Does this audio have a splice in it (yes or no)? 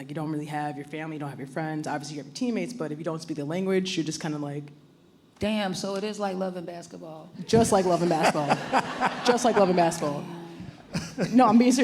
no